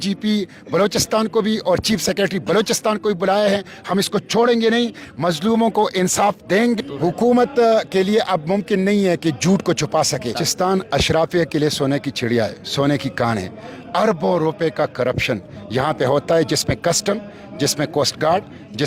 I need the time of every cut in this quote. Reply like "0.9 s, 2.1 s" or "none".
6.8 s, 10.4 s